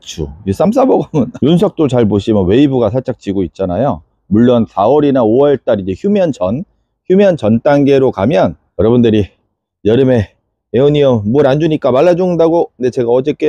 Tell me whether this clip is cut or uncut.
cut